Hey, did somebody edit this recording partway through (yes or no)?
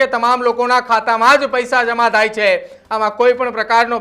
no